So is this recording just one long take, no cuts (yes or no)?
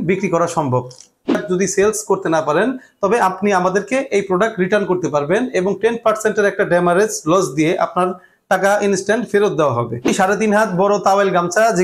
no